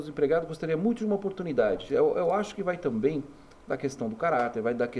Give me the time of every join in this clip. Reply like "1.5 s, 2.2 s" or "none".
1.8 s